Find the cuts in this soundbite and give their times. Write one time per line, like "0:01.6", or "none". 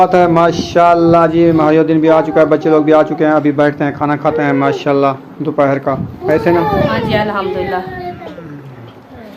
0:08.2